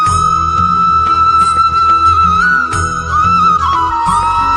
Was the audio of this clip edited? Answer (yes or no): yes